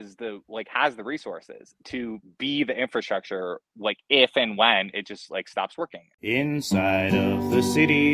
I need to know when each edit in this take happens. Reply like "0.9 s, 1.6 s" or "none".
6.1 s

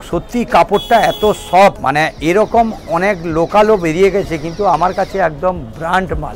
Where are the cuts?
1.8 s

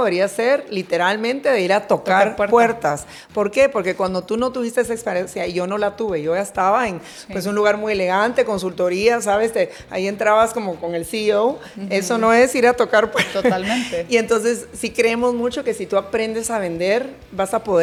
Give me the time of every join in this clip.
none

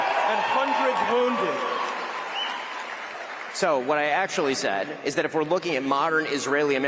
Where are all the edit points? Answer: 2.3 s

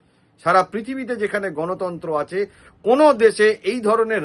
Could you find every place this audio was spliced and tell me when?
none

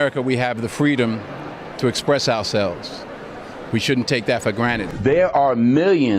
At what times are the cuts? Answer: 4.9 s

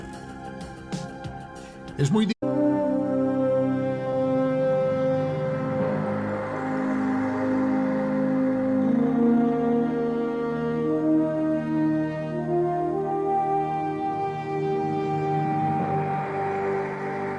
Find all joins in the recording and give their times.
none

